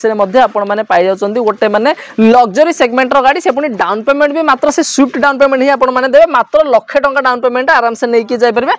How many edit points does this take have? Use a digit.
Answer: 0